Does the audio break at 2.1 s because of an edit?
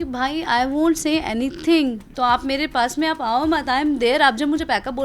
yes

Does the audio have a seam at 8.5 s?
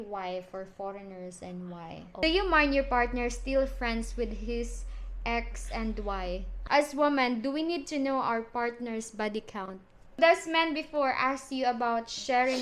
no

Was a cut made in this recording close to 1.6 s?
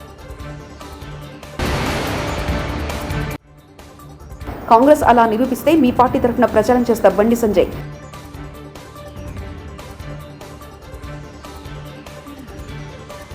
yes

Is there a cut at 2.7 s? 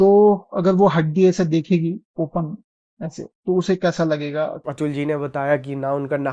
no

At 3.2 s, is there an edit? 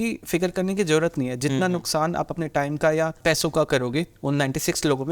yes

